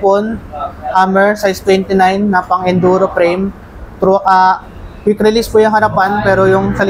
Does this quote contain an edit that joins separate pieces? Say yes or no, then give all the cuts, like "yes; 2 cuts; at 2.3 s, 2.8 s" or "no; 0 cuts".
no; 0 cuts